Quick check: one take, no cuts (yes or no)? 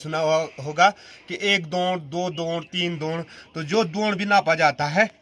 yes